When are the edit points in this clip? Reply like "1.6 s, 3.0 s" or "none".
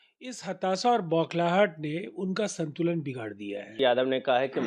3.7 s